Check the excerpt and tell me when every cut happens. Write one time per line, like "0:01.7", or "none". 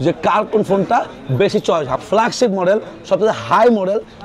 0:01.9